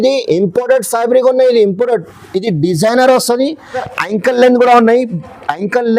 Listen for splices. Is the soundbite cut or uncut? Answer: cut